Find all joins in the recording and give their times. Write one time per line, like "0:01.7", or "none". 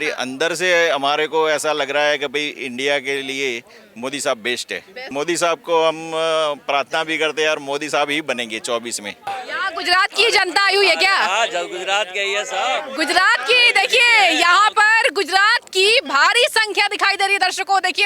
0:05.0
0:09.3